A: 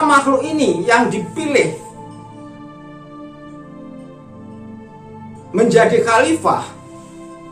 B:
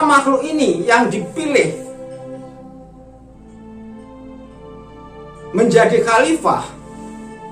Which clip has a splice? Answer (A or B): B